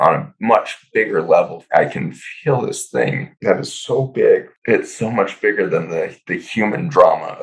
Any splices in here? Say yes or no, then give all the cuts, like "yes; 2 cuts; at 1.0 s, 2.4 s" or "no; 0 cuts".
yes; 3 cuts; at 1.6 s, 3.3 s, 4.5 s